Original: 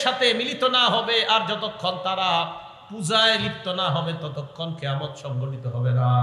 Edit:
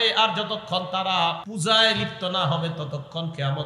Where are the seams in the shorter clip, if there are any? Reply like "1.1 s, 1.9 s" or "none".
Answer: 1.5 s